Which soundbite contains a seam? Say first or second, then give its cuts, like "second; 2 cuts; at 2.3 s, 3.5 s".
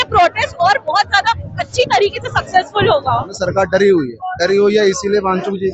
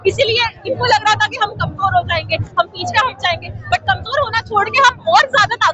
first; 1 cut; at 3.3 s